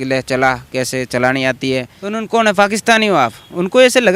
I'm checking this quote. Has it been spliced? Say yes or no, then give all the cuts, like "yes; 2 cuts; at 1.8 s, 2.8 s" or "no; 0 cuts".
yes; 1 cut; at 2.0 s